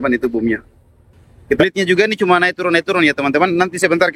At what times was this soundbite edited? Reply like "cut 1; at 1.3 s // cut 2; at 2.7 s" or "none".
cut 1; at 1.6 s